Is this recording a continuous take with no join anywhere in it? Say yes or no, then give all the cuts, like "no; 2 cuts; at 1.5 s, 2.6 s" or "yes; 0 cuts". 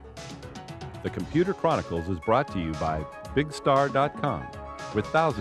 no; 1 cut; at 1.0 s